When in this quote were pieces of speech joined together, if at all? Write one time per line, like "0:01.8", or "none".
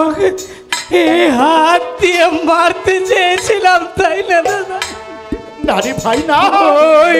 none